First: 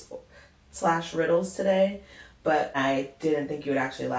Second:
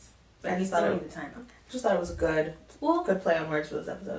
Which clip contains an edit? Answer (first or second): first